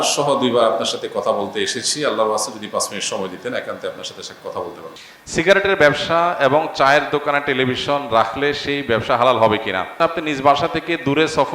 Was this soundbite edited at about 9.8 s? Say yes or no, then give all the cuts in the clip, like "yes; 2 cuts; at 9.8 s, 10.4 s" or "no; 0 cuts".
yes; 2 cuts; at 5.0 s, 9.8 s